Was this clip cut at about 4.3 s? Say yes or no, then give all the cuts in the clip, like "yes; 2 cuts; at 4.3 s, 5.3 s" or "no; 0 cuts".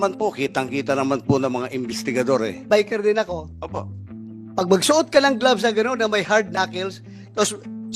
no; 1 cut; at 2.6 s